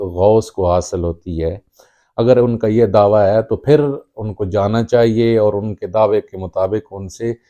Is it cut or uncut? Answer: uncut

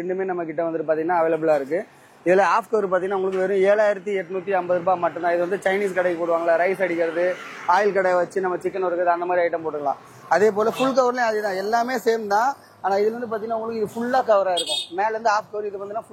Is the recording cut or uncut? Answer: uncut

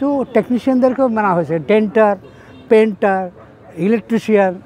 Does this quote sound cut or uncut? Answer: uncut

